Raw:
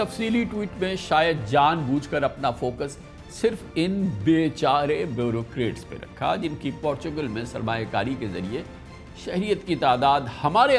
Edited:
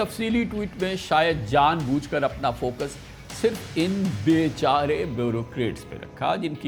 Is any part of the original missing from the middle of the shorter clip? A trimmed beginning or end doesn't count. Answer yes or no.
no